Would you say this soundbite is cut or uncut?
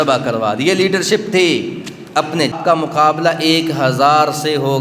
cut